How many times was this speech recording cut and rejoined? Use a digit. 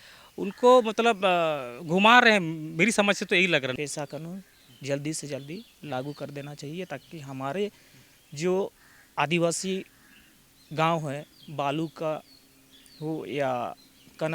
1